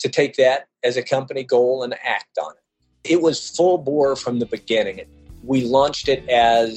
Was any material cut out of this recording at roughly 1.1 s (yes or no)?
no